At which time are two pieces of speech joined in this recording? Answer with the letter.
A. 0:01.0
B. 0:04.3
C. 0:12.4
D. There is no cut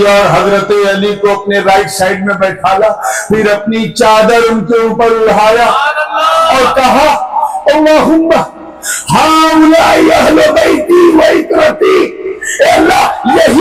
D